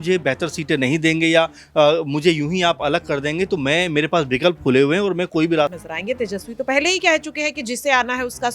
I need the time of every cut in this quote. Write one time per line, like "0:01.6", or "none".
0:05.8